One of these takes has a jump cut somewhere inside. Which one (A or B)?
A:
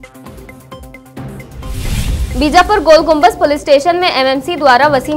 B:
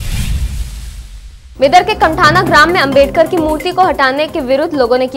B